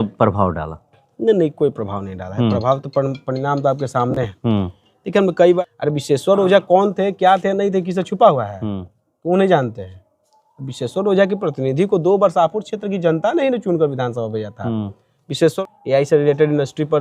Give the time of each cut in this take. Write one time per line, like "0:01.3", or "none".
0:05.6
0:15.5